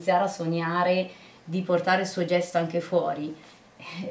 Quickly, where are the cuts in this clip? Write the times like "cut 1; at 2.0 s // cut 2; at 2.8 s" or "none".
none

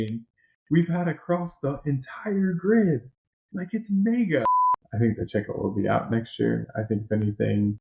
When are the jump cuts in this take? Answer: cut 1; at 4.5 s

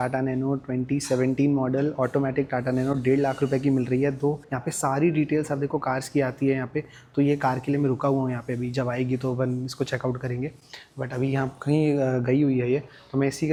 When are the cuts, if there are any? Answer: none

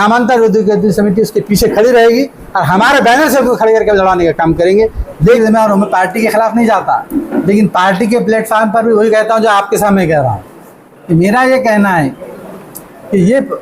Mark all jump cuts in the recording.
cut 1; at 5.4 s

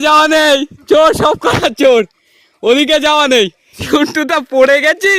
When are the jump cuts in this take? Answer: cut 1; at 3.8 s

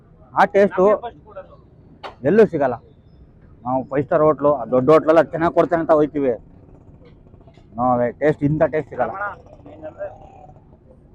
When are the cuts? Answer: none

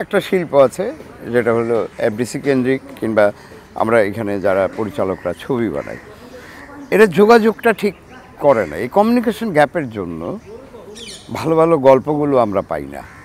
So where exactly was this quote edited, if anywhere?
none

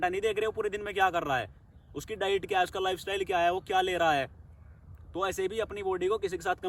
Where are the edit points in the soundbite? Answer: none

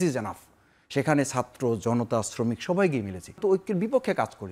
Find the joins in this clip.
cut 1; at 3.4 s

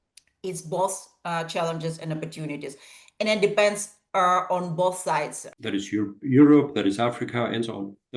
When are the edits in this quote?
cut 1; at 5.4 s

